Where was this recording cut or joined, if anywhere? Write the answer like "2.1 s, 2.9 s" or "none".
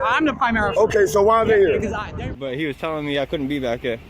2.1 s